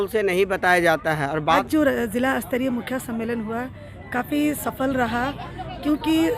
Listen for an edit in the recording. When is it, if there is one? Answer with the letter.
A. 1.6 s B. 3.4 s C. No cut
A